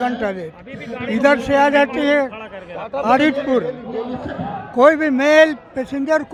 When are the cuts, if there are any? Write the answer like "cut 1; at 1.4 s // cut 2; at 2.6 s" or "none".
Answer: none